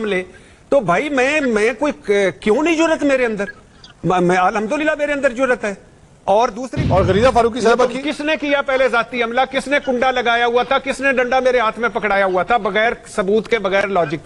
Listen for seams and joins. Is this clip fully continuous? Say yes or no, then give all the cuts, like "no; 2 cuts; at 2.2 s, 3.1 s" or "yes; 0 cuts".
no; 1 cut; at 6.7 s